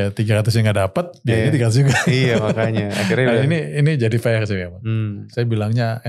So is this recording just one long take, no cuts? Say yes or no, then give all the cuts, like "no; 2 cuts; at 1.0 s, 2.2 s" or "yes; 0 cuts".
no; 1 cut; at 5.2 s